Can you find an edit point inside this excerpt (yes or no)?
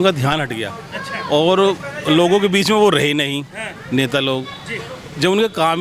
no